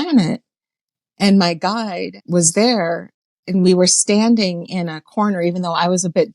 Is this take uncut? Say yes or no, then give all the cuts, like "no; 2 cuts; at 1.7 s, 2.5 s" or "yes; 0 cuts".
no; 1 cut; at 2.1 s